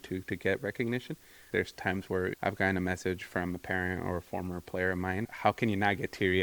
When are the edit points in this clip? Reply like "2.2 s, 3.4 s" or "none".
1.5 s, 5.3 s

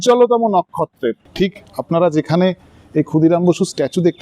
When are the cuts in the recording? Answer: 1.2 s

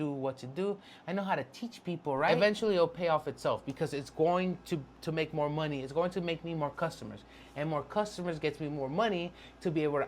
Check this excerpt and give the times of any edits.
2.3 s

